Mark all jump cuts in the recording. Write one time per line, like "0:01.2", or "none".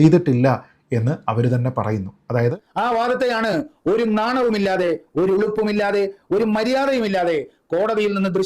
0:02.5